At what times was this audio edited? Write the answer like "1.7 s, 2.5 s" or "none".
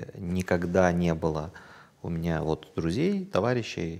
none